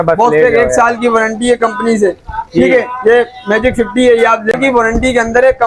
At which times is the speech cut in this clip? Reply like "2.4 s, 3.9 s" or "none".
4.5 s